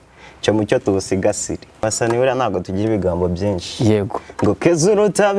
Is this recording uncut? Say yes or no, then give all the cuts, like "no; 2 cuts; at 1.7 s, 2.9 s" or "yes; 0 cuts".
no; 1 cut; at 1.8 s